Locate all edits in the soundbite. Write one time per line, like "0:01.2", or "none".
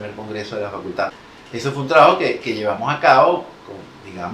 0:01.1